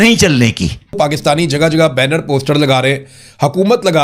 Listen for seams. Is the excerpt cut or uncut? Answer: cut